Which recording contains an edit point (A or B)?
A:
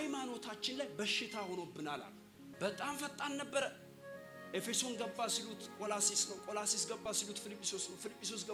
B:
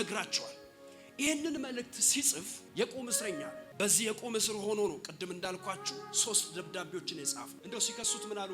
B